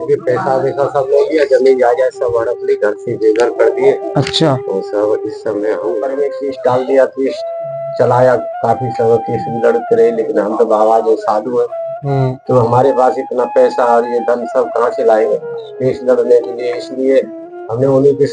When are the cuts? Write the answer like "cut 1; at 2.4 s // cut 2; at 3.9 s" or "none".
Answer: cut 1; at 5.9 s